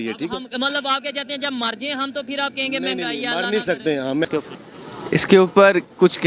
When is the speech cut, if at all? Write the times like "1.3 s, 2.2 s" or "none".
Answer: 4.3 s